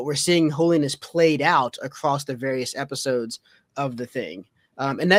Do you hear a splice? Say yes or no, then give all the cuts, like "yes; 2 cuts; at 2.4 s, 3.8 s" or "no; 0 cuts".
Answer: no; 0 cuts